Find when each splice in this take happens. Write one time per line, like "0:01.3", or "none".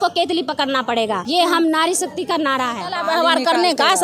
0:01.2
0:02.9